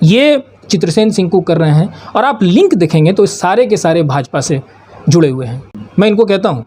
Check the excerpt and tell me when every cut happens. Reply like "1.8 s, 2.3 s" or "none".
5.6 s